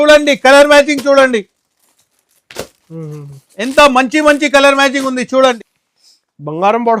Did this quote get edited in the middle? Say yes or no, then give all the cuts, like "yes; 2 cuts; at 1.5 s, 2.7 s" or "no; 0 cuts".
yes; 1 cut; at 5.6 s